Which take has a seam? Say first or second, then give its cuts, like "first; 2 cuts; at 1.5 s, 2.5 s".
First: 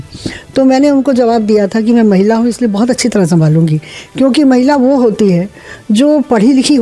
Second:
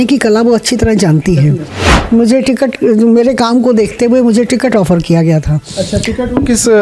second; 1 cut; at 1.8 s